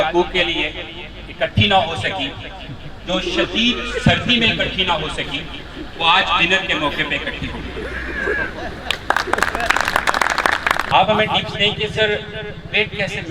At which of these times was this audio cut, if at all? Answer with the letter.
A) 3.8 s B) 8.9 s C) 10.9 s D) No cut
C